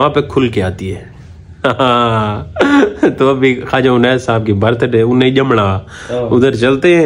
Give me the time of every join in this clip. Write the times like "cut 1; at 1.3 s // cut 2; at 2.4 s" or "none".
none